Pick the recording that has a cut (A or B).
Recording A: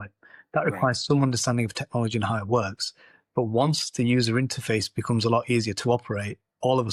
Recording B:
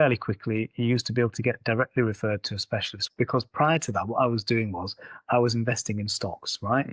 B